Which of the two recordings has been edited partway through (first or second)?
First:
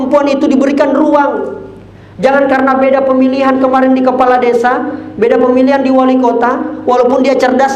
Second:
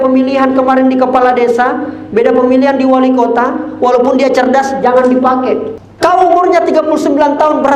second